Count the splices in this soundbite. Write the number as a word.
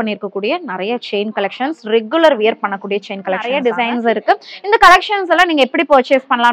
one